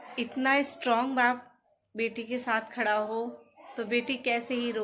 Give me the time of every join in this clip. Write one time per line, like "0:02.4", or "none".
none